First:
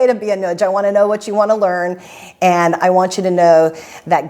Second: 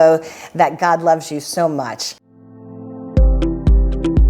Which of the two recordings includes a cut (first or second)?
second